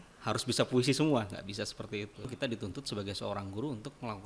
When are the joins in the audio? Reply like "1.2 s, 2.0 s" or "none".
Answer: 2.3 s